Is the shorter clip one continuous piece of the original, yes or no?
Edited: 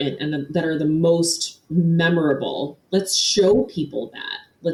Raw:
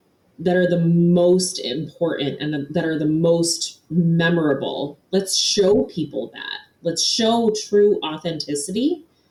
yes